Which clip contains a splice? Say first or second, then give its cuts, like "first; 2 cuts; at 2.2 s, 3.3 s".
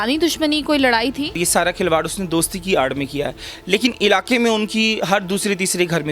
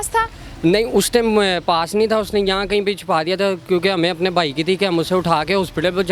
first; 1 cut; at 1.4 s